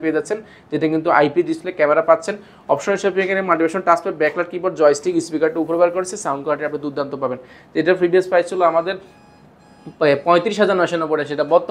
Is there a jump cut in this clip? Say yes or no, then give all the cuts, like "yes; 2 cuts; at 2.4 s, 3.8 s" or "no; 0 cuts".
no; 0 cuts